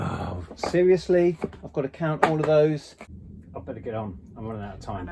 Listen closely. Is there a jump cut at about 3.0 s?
yes; 1 cut; at 3.0 s

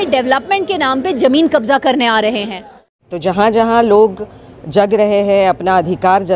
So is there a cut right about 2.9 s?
yes; 1 cut; at 2.9 s

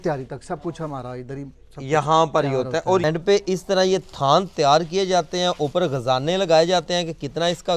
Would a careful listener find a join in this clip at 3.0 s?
yes; 1 cut; at 3.0 s

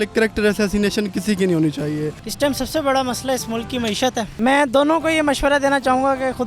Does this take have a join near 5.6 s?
no; 2 cuts; at 2.2 s, 4.3 s

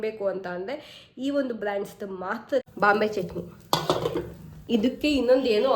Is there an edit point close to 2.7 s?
yes; 1 cut; at 2.7 s

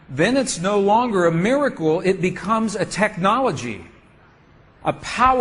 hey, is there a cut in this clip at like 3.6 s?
no; 0 cuts

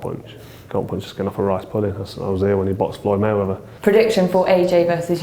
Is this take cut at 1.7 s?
no; 1 cut; at 3.6 s

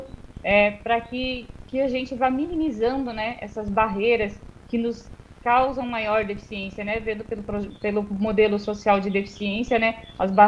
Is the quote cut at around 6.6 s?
no; 0 cuts

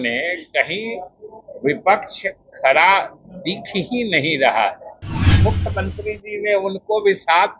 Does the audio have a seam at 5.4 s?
yes; 1 cut; at 5.4 s

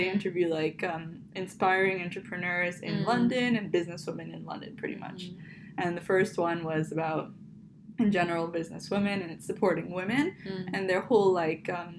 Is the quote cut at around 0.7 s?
no; 0 cuts

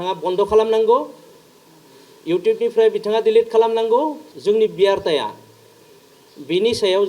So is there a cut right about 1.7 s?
no; 1 cut; at 4.3 s

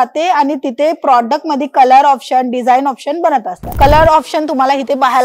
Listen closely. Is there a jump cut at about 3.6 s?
yes; 1 cut; at 3.6 s

